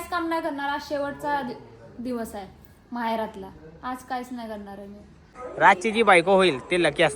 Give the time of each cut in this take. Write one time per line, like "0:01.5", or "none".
0:05.5